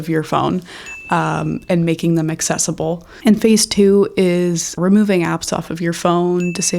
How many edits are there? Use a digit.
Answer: 1